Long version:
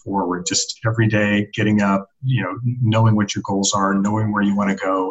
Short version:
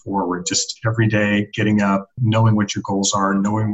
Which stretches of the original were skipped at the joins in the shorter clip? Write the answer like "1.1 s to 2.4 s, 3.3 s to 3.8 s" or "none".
2.1 s to 2.7 s